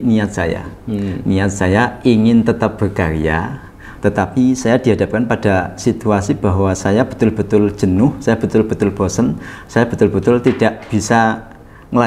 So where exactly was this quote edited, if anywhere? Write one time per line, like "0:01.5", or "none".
none